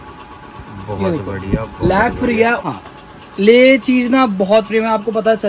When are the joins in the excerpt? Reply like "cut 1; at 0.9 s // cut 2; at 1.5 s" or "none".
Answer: cut 1; at 2.6 s